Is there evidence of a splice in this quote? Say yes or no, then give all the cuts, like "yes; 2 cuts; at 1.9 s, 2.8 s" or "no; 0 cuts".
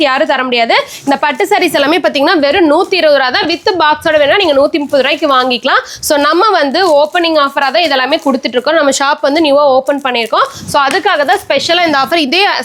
no; 0 cuts